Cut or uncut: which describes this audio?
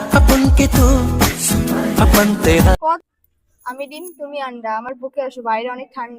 cut